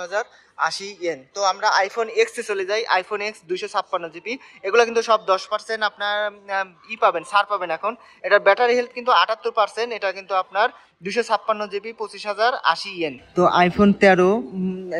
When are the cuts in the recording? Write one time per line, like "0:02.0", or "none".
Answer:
0:13.2